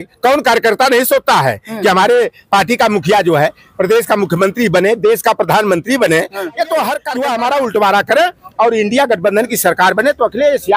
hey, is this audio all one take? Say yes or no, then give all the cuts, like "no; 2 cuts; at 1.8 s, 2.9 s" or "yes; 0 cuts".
no; 1 cut; at 7.1 s